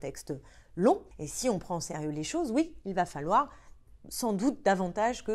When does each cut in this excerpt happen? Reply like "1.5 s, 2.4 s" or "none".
1.2 s